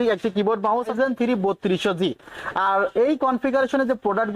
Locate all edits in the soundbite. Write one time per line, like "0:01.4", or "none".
0:00.9